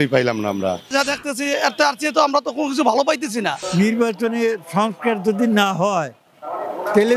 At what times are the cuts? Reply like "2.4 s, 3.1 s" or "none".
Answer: 0.9 s, 3.6 s

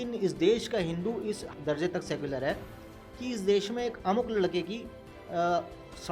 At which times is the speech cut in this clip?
none

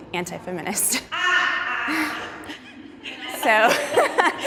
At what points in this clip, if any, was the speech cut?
none

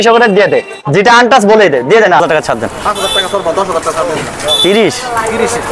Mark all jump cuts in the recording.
2.2 s

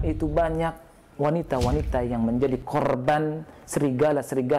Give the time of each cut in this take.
none

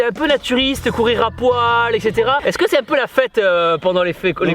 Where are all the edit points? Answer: 2.5 s

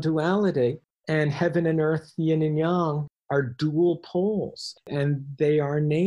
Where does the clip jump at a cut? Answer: 0.9 s, 3.1 s, 4.8 s

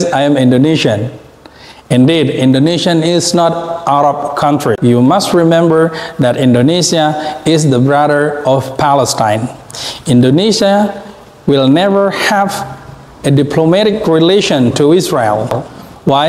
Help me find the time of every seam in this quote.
4.8 s

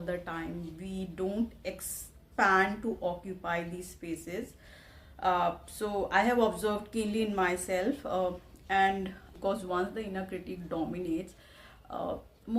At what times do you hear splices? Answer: 9.3 s

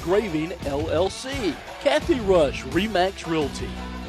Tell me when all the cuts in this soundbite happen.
1.7 s

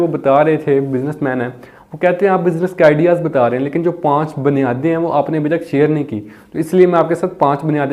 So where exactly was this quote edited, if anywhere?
none

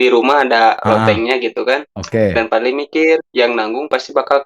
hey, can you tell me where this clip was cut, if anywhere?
2.0 s, 3.3 s

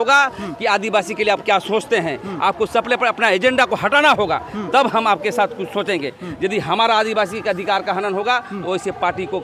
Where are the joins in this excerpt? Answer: none

